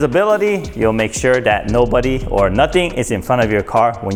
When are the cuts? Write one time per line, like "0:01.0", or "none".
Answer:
none